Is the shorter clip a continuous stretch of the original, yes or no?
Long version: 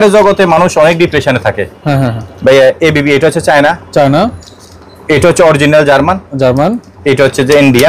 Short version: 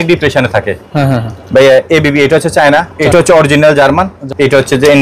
no